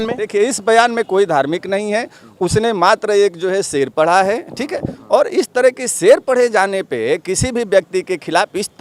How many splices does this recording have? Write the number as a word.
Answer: zero